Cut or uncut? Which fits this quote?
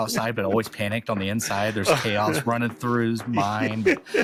uncut